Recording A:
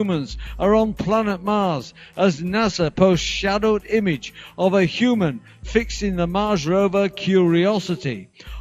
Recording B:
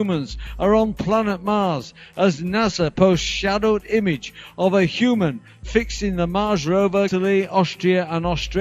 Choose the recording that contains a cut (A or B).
A